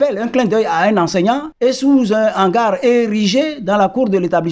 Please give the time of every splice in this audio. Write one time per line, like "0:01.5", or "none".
0:01.5